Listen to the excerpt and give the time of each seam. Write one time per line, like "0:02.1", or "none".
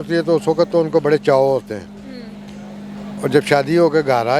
none